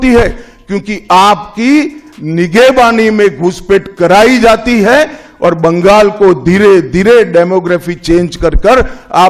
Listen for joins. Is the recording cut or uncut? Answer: uncut